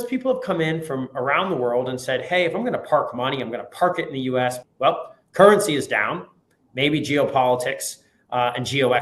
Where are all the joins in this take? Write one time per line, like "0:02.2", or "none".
0:04.7